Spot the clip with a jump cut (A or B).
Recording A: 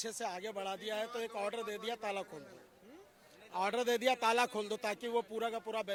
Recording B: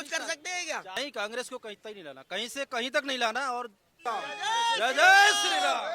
B